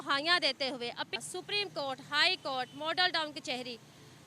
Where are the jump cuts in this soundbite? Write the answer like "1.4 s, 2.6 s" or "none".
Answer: 1.2 s